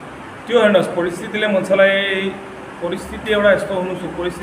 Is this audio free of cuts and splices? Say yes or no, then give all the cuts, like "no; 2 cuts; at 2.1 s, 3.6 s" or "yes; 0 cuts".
yes; 0 cuts